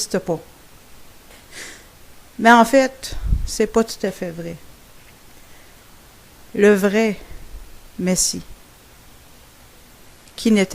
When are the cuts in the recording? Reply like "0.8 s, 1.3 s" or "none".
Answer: 3.9 s